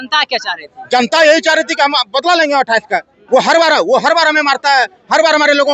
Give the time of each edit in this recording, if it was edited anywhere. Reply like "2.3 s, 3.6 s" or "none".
3.1 s